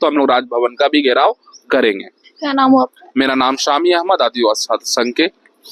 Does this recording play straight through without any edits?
yes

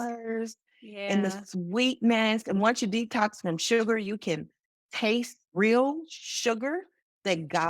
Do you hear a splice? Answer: yes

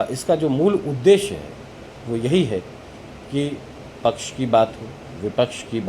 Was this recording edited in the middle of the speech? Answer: no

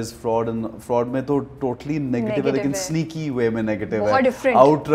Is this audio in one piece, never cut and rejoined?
yes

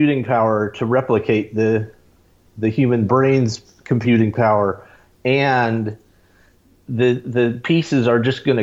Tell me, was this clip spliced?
no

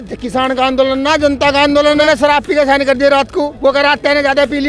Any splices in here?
yes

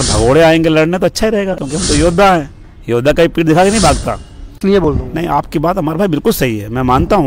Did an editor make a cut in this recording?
yes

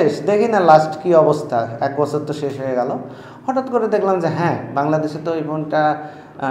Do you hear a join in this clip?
no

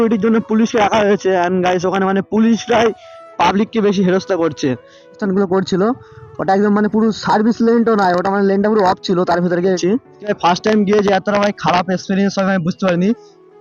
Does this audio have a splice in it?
yes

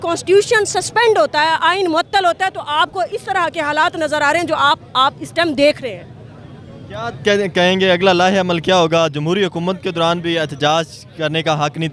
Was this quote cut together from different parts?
no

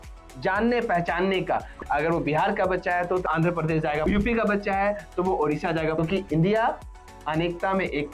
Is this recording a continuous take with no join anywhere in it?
no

